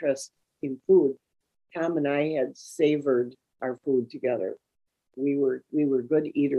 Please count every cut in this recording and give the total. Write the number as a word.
zero